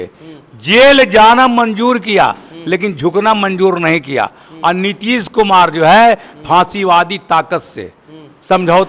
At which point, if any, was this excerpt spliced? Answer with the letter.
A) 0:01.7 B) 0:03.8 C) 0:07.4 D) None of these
D